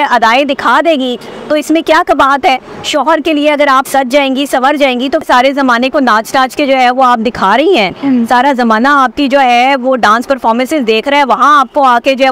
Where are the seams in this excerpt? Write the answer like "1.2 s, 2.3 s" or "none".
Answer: 5.2 s

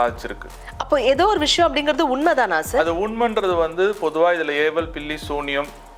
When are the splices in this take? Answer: none

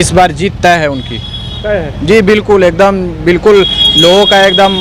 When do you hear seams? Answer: none

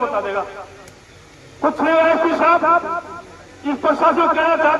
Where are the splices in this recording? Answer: none

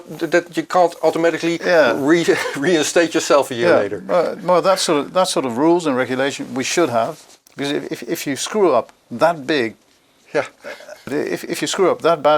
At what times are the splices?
none

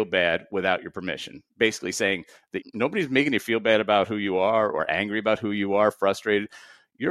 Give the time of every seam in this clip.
2.6 s

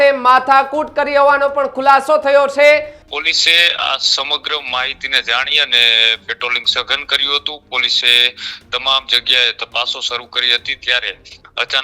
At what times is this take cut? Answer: 3.0 s

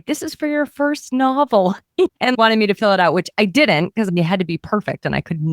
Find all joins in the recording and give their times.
2.1 s, 4.1 s

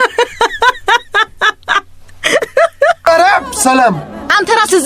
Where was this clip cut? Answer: 3.1 s

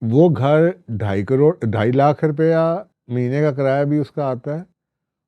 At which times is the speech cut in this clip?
none

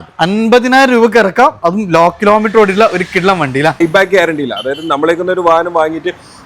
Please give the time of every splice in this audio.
3.8 s

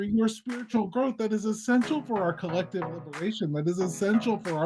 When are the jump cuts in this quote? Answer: none

